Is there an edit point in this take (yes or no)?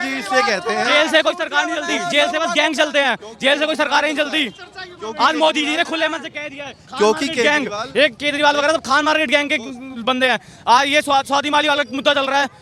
no